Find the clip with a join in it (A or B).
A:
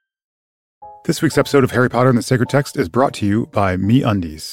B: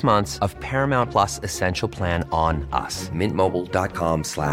A